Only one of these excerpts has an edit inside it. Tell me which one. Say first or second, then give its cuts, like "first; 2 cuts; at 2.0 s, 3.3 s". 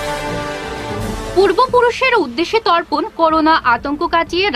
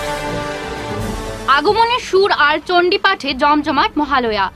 first; 1 cut; at 0.9 s